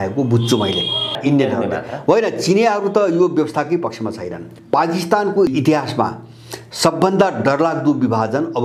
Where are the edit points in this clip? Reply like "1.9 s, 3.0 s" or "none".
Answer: 1.2 s, 4.5 s, 5.5 s